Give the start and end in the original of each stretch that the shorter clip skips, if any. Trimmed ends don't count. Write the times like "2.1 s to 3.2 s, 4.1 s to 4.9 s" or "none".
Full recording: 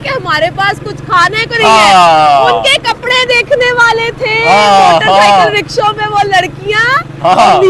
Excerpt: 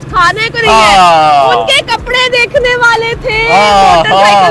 none